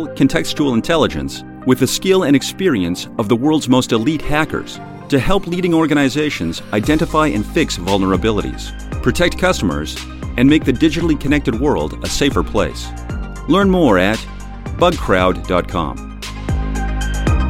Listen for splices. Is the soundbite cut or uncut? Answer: cut